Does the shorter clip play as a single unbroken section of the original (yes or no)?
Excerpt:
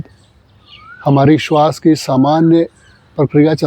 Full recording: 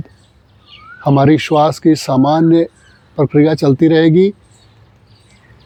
yes